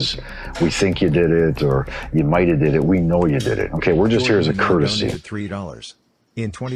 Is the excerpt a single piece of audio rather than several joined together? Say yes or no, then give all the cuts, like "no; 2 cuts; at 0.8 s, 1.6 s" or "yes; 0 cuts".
yes; 0 cuts